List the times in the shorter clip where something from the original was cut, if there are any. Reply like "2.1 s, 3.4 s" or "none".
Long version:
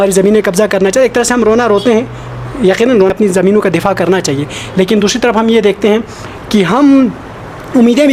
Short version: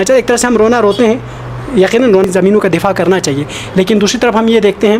2.3 s